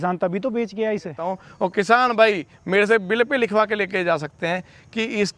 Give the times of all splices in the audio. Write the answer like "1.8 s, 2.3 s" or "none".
1.3 s